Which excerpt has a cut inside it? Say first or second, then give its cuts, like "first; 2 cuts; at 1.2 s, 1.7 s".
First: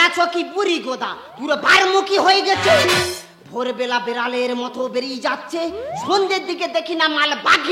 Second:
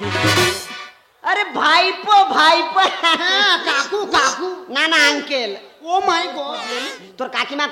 second; 1 cut; at 6.6 s